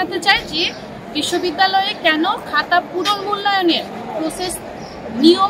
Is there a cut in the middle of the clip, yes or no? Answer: no